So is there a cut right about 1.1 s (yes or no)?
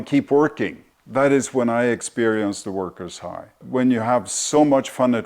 no